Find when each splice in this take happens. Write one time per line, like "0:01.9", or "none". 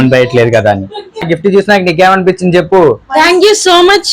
0:01.2